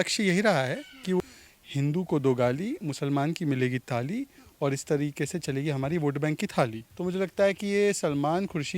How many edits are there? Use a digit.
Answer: 2